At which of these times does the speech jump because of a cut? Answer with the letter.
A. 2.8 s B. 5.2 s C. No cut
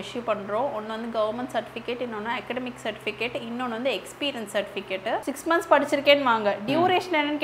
B